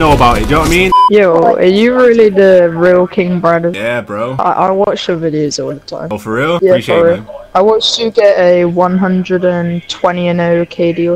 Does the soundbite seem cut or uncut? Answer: cut